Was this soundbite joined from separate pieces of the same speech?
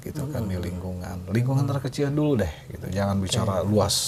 no; 0 cuts

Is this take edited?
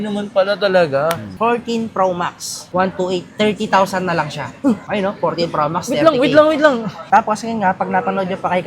yes; 2 cuts; at 1.2 s, 7.1 s

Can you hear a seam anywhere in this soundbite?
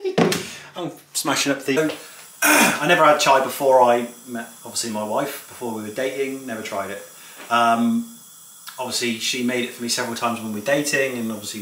yes; 1 cut; at 1.8 s

